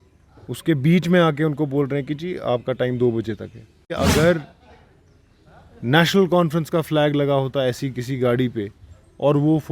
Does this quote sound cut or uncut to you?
cut